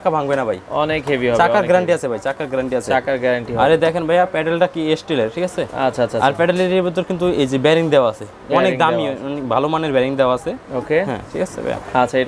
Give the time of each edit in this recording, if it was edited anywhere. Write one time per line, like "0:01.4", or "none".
none